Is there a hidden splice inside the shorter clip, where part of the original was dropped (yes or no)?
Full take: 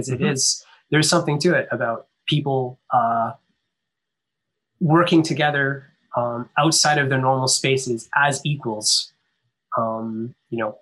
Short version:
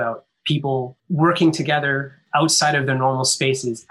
yes